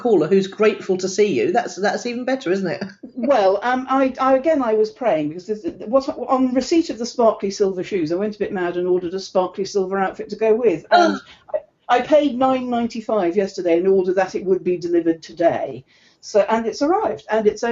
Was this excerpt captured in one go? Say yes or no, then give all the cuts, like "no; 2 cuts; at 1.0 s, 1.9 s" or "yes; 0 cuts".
yes; 0 cuts